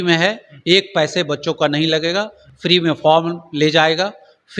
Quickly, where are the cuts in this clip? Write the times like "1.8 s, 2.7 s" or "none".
none